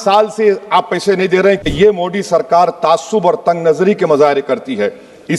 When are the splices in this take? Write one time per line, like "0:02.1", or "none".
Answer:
0:01.7